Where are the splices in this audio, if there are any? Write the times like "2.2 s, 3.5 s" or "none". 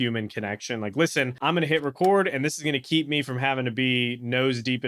1.3 s